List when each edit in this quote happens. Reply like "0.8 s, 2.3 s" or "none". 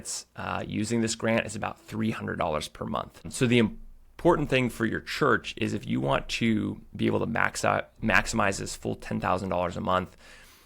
3.2 s